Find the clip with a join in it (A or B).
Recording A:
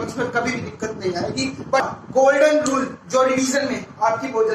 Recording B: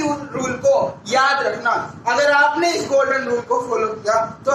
A